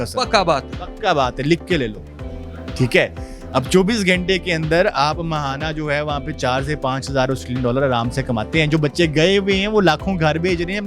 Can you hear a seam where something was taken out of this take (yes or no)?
no